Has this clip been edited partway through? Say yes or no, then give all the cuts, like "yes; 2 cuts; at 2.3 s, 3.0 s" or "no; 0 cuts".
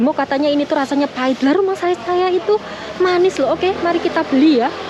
no; 0 cuts